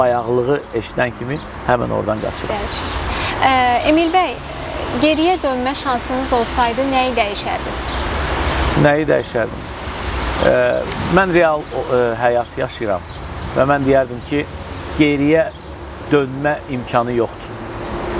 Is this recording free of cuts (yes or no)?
yes